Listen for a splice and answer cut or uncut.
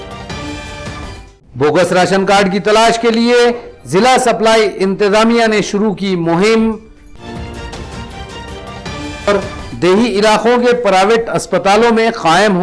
uncut